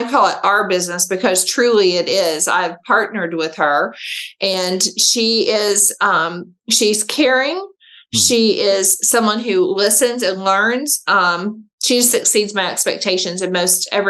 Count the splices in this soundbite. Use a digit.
0